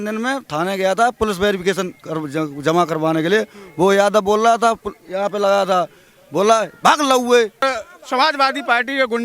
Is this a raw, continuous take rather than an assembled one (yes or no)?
no